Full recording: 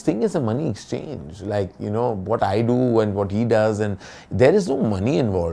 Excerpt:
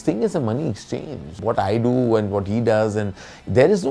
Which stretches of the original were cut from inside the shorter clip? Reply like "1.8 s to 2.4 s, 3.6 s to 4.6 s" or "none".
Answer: 1.4 s to 2.2 s